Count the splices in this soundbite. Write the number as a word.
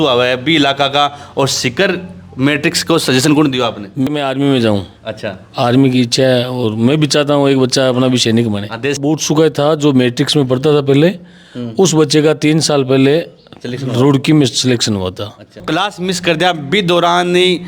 three